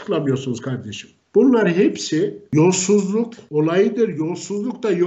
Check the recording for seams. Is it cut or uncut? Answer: cut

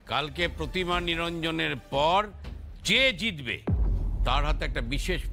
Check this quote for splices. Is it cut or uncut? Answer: uncut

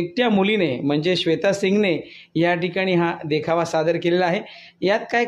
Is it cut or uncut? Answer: uncut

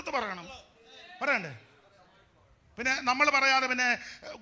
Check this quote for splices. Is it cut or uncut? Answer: uncut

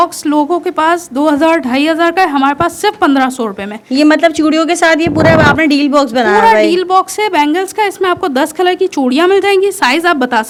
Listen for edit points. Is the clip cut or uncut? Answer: uncut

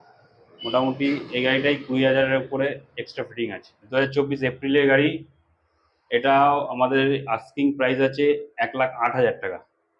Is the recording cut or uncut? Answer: cut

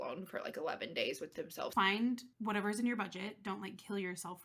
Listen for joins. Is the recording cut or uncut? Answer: cut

